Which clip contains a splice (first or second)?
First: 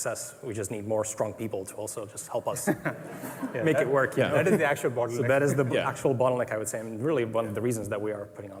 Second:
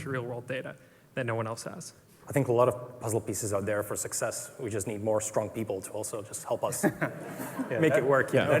second